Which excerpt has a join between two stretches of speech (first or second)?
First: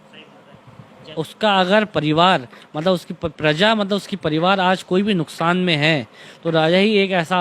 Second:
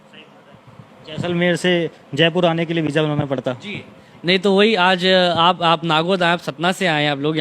first